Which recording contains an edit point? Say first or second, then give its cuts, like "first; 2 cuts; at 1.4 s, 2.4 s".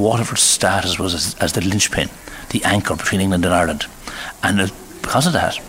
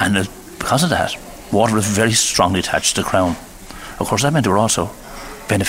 second; 1 cut; at 2.2 s